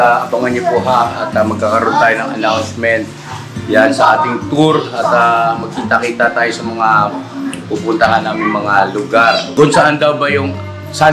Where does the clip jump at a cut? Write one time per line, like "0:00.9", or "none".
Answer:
0:09.5